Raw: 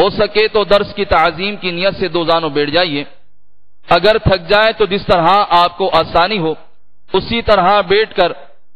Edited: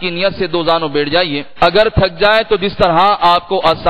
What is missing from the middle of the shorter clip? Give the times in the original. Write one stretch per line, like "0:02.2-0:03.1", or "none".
0:03.0-0:03.7